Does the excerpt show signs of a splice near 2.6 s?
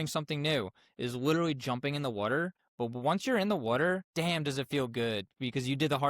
yes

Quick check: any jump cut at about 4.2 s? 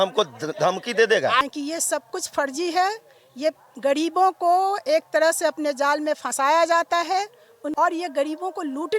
no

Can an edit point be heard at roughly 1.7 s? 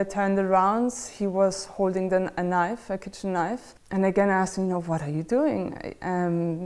no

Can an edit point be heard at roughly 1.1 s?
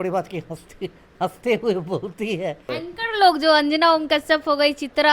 no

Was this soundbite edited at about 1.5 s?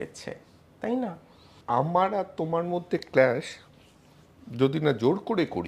yes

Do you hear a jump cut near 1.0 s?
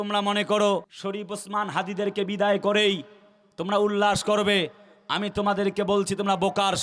yes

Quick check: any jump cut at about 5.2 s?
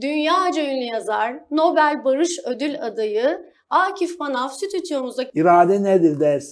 yes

